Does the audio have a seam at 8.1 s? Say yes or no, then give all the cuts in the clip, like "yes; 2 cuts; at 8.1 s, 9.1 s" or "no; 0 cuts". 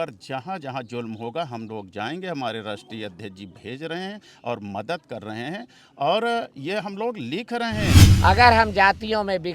yes; 1 cut; at 8.1 s